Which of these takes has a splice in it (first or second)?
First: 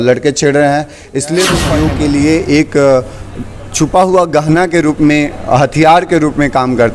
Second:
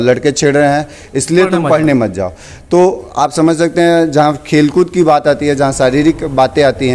first